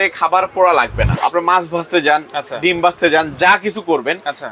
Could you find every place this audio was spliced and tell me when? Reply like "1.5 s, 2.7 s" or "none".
1.2 s